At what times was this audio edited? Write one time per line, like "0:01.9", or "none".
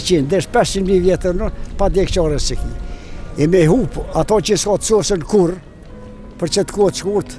none